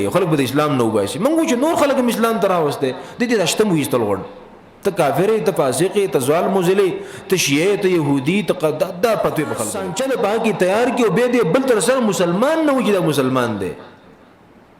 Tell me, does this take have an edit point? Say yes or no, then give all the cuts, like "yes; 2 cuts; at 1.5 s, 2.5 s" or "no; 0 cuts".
yes; 1 cut; at 9.8 s